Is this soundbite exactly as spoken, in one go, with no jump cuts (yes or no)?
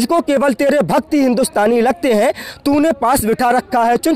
yes